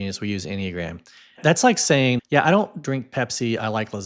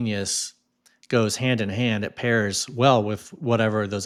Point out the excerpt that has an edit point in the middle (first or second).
first